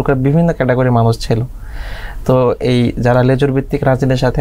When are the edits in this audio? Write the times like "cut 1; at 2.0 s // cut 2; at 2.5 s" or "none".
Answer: none